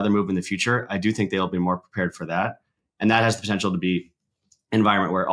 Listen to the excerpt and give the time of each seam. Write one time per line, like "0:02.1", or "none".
none